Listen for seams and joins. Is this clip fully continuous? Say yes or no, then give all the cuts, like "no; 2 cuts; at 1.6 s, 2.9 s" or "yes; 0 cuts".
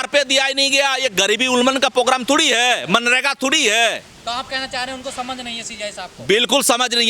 no; 1 cut; at 4.1 s